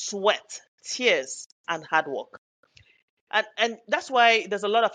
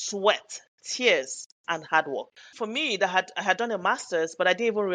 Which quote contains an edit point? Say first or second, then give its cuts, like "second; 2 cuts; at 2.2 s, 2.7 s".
second; 1 cut; at 2.5 s